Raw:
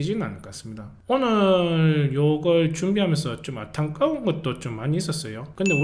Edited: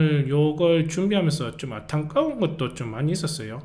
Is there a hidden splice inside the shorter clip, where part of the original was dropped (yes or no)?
no